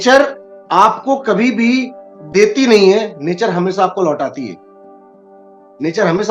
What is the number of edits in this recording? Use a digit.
0